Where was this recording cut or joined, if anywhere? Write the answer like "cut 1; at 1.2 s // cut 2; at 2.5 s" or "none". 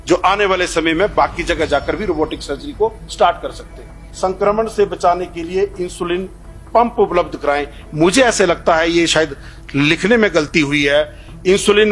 cut 1; at 4.0 s